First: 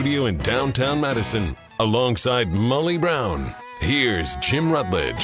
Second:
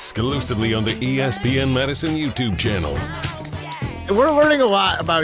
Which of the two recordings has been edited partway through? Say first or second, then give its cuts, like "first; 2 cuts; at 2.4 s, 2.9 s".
second; 1 cut; at 4.0 s